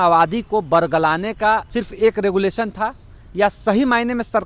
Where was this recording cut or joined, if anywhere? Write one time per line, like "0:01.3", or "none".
0:01.7